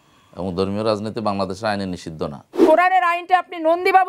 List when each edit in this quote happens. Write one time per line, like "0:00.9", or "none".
0:02.6

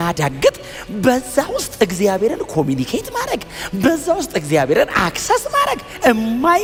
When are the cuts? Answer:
none

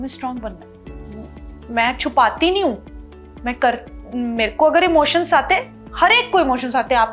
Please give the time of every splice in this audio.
none

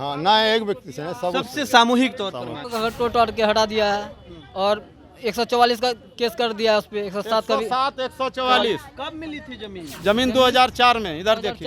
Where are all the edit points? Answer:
0:02.6

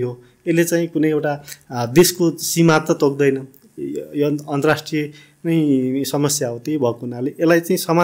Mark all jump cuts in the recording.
none

